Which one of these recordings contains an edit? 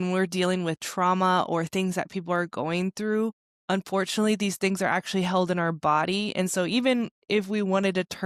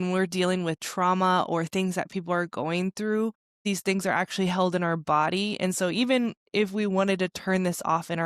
second; 1 cut; at 3.6 s

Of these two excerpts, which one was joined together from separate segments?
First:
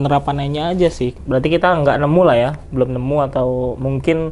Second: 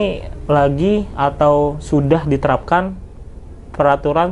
first; 1 cut; at 1.2 s

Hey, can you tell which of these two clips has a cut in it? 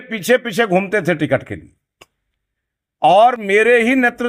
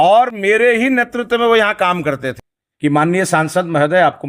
second; 1 cut; at 2.3 s

